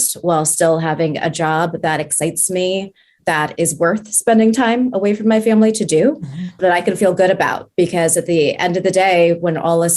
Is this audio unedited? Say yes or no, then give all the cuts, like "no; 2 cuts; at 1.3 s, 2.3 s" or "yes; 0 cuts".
no; 1 cut; at 3.1 s